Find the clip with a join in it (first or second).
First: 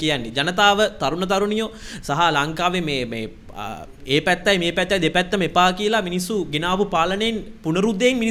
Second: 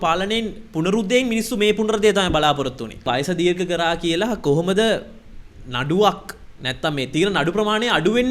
second